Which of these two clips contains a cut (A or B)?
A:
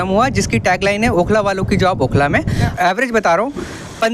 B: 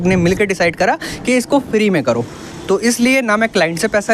A